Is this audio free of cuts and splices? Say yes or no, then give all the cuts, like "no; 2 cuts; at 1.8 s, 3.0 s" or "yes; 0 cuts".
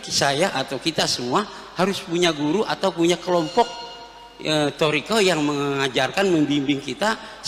yes; 0 cuts